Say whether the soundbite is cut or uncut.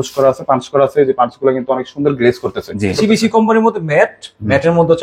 cut